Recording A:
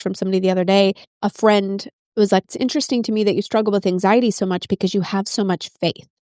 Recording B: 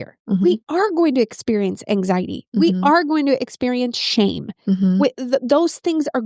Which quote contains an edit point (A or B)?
A